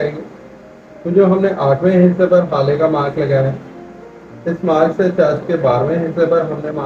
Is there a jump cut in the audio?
no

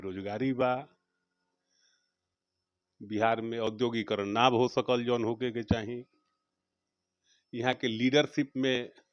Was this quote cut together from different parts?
no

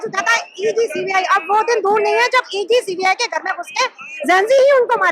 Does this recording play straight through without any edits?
yes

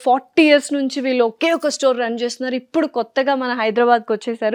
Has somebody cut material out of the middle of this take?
no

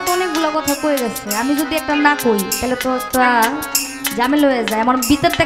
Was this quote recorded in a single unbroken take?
yes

